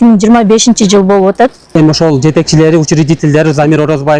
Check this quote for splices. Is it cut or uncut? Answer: cut